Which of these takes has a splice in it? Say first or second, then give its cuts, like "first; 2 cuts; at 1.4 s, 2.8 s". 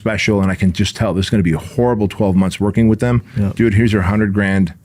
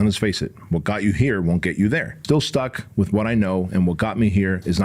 second; 1 cut; at 2.2 s